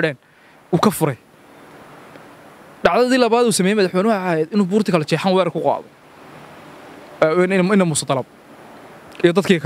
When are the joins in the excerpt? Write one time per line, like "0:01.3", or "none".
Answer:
none